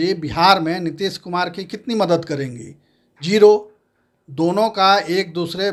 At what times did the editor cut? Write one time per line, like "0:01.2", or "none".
none